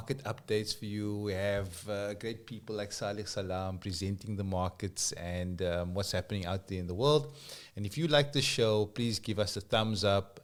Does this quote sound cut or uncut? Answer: uncut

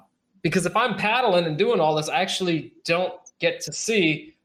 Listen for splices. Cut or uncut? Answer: uncut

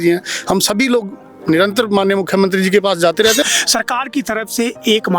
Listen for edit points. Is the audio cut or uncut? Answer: cut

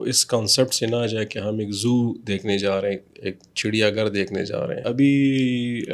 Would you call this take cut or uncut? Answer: cut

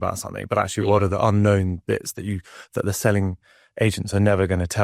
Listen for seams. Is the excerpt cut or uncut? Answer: uncut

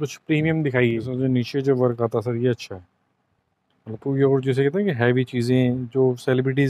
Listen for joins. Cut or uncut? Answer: cut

